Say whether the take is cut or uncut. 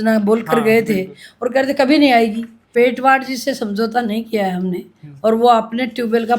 cut